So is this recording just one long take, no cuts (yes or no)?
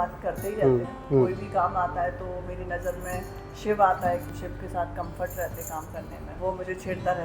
no